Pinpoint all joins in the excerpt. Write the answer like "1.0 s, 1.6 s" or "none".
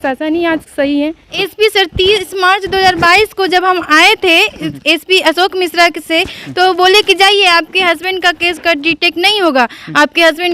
1.3 s